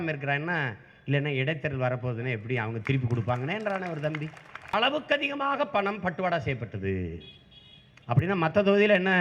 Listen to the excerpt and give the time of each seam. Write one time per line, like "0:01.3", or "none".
0:04.7